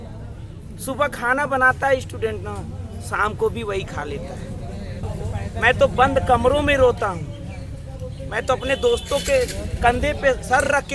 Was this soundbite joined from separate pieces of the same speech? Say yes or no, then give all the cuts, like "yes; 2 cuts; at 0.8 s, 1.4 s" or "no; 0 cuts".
yes; 1 cut; at 5.0 s